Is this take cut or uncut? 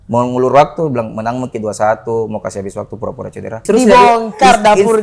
cut